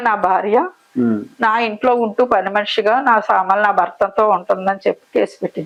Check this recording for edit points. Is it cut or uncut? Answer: uncut